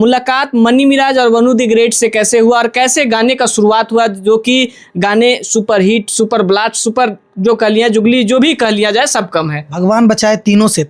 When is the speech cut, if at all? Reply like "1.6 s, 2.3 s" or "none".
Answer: 9.7 s